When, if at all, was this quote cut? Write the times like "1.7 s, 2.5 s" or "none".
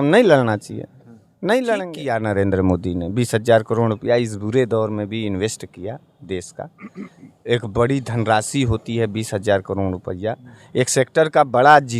2.0 s